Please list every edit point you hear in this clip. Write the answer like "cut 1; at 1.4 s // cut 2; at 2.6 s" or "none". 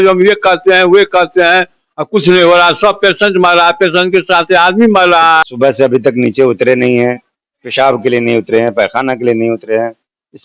cut 1; at 5.4 s